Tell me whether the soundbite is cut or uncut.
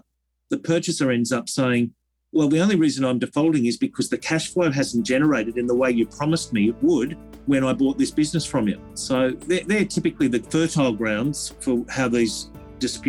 cut